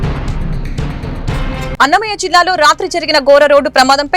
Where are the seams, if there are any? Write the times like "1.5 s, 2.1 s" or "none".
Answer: none